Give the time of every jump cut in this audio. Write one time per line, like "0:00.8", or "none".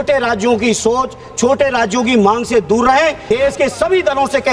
0:03.2